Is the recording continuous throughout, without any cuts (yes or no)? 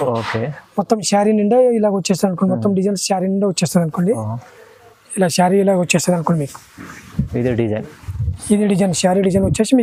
yes